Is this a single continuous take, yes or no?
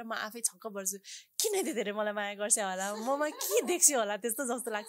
yes